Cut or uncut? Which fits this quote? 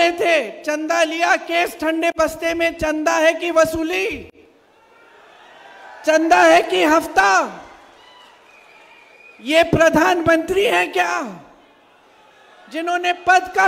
uncut